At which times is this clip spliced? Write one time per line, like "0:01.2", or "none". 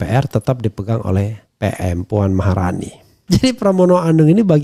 0:03.1